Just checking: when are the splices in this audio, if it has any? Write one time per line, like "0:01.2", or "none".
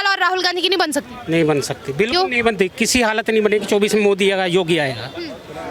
none